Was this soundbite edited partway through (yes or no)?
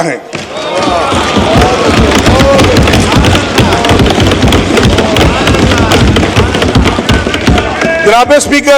no